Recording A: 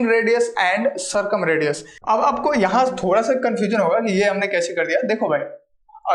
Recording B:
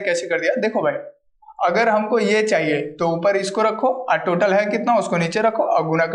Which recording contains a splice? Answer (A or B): A